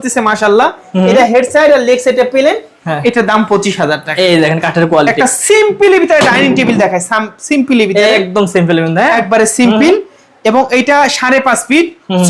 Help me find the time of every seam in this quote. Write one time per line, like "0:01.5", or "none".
none